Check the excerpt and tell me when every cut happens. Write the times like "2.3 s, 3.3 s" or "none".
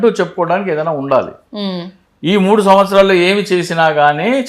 none